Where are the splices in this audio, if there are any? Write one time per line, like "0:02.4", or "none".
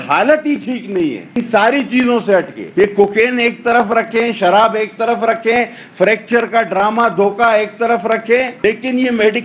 0:01.3
0:02.6
0:08.5